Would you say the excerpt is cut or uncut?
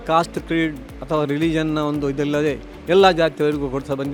uncut